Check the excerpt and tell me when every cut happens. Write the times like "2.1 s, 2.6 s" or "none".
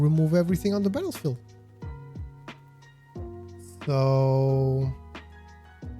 1.7 s, 3.3 s, 5.0 s